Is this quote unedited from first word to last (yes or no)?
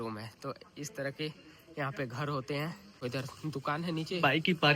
no